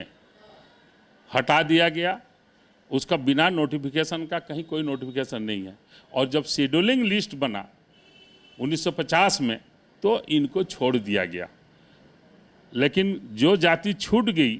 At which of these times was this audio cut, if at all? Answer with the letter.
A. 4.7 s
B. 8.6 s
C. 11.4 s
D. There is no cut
D